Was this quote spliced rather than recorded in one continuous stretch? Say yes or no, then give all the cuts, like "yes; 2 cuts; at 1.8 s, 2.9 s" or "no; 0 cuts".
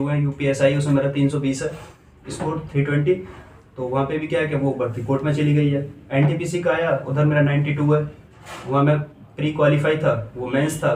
no; 0 cuts